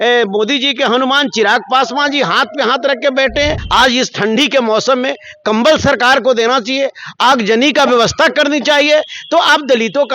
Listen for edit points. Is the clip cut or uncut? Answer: cut